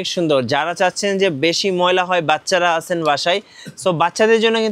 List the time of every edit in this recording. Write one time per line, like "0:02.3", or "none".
none